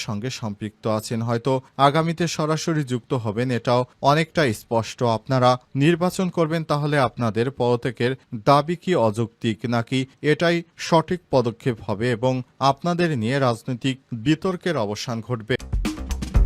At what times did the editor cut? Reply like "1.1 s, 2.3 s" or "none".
15.6 s